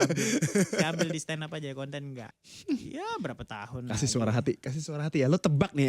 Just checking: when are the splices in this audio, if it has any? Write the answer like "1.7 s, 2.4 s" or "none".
2.3 s